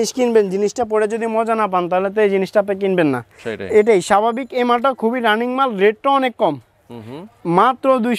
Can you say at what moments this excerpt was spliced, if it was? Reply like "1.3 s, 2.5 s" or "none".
none